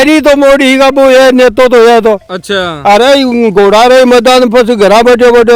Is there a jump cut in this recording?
no; 0 cuts

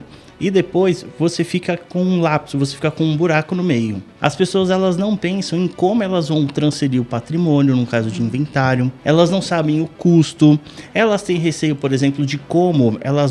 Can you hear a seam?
yes; 2 cuts; at 4.0 s, 9.0 s

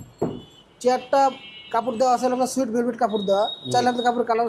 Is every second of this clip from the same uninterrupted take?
yes; 0 cuts

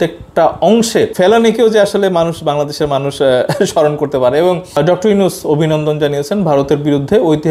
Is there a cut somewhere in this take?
yes; 2 cuts; at 1.1 s, 4.8 s

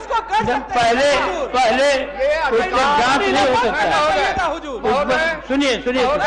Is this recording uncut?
yes; 0 cuts

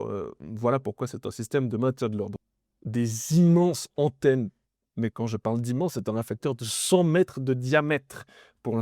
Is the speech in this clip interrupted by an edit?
yes; 1 cut; at 2.4 s

